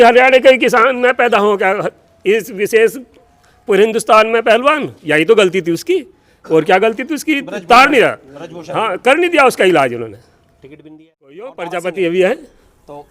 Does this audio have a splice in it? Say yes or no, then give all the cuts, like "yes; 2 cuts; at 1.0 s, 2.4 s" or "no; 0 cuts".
yes; 1 cut; at 11.6 s